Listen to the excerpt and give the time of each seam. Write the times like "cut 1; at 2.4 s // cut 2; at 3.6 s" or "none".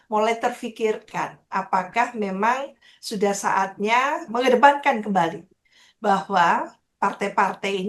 cut 1; at 4.3 s